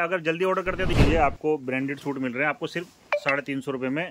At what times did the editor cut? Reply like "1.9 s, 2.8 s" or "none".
0.9 s